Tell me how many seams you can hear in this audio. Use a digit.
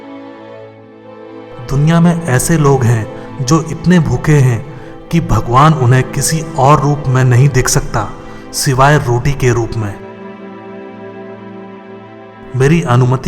1